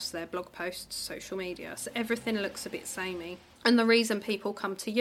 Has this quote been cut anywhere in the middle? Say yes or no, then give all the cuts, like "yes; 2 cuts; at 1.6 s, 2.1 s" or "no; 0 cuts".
yes; 1 cut; at 3.4 s